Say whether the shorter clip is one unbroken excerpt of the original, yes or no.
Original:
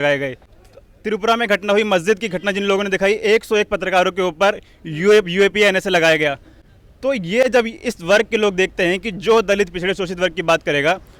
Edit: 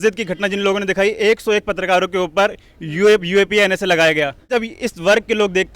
no